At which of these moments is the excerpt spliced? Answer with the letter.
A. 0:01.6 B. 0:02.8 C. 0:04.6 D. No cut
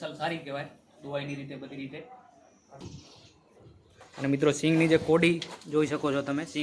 B